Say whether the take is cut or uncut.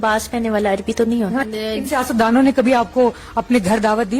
cut